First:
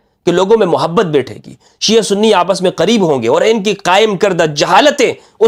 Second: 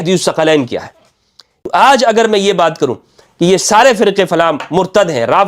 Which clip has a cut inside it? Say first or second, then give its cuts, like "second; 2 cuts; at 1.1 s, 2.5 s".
second; 1 cut; at 1.6 s